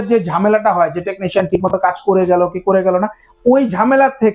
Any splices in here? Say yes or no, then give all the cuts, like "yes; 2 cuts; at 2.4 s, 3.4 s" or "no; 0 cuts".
no; 0 cuts